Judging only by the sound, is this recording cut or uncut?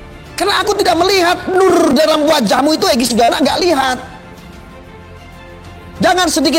uncut